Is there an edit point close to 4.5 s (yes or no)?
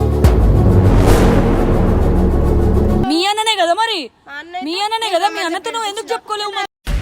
no